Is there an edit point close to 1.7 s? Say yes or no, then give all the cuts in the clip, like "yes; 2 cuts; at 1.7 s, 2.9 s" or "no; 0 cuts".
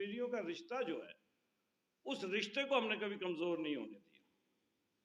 no; 0 cuts